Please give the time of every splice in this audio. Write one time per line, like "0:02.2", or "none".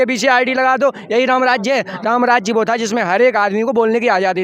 none